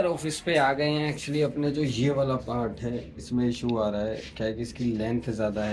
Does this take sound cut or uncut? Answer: uncut